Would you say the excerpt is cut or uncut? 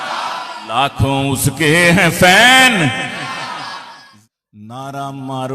cut